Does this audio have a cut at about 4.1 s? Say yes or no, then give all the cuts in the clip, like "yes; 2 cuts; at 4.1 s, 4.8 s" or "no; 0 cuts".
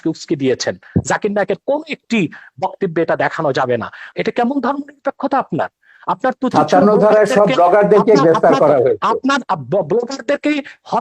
yes; 1 cut; at 4.1 s